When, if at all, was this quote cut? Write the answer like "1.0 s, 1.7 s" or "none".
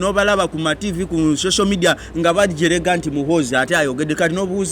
none

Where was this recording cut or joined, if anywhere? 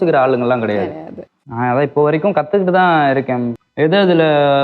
3.6 s

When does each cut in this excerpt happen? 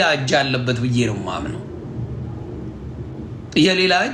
none

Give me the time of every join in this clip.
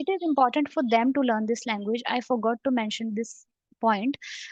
none

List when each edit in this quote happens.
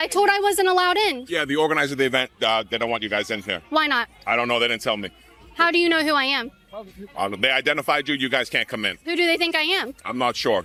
none

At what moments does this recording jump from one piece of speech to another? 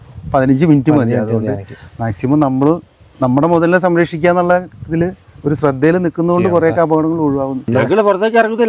7.7 s

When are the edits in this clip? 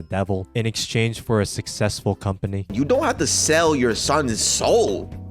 2.7 s

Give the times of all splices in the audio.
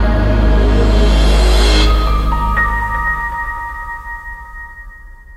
none

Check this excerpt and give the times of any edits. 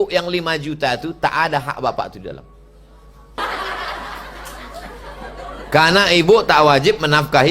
3.4 s

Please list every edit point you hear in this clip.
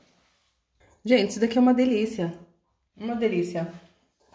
0.9 s

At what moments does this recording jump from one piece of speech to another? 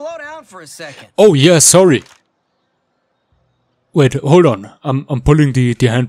none

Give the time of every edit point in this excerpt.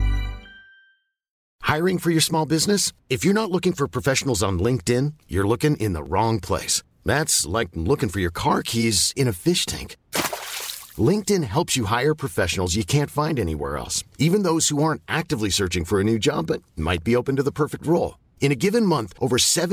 1.5 s

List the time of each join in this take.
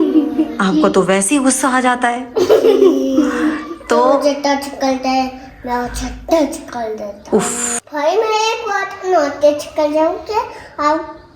7.7 s

